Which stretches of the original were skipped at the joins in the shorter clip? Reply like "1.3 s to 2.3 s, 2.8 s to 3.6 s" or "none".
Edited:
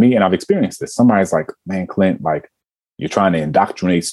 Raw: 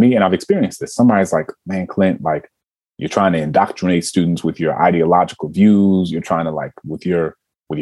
none